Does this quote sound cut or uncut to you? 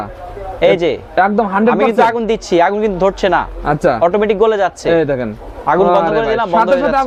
uncut